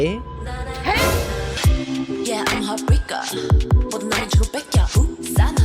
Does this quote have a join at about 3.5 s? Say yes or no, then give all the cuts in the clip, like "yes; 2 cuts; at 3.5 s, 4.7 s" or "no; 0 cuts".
no; 1 cut; at 1.6 s